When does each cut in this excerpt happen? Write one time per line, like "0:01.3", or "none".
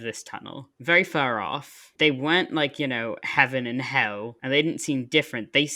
none